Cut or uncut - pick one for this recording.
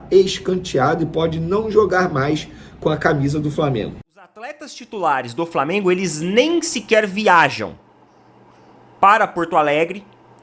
cut